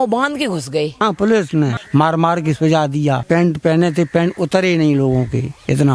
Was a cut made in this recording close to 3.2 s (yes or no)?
yes